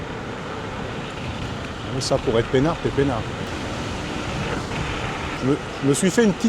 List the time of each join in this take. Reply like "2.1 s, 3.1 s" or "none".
3.5 s, 5.4 s